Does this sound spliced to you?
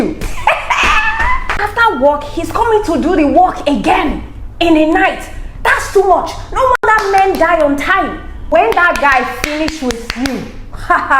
yes; 2 cuts; at 1.5 s, 8.4 s

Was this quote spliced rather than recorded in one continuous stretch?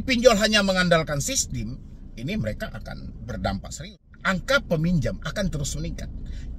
yes; 1 cut; at 3.8 s

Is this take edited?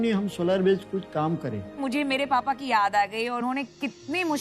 yes; 2 cuts; at 1.7 s, 3.4 s

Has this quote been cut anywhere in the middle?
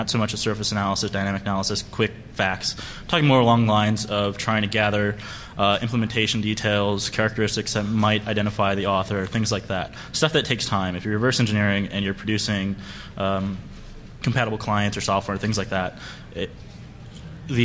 yes; 1 cut; at 13.0 s

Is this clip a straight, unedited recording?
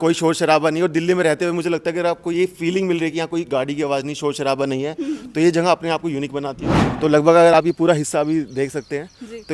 no; 1 cut; at 6.6 s

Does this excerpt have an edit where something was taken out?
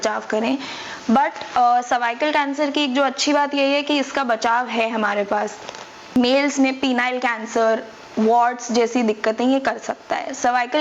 yes; 1 cut; at 6.2 s

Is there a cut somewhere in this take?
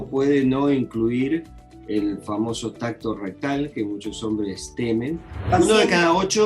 yes; 1 cut; at 5.5 s

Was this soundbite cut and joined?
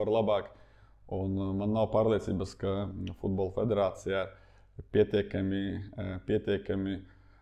no; 0 cuts

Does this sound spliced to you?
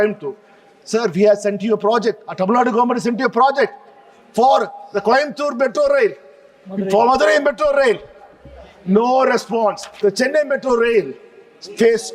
yes; 1 cut; at 9.9 s

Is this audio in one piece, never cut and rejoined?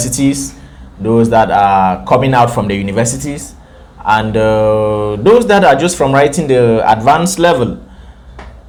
yes; 0 cuts

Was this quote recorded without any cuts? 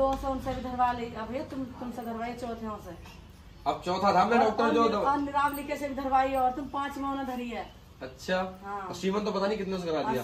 yes; 0 cuts

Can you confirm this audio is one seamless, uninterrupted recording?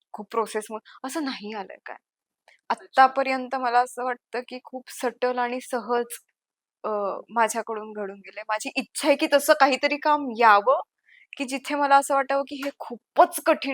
yes; 0 cuts

